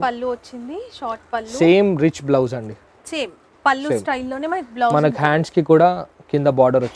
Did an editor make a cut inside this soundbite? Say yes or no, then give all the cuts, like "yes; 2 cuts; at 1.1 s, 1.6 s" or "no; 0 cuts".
no; 0 cuts